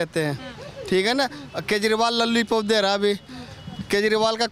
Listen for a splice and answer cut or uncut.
uncut